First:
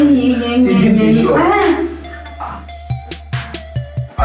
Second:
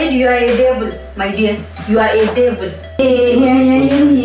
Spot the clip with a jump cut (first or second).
second